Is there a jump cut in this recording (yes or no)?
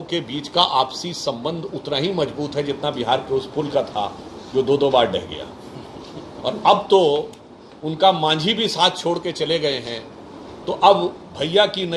no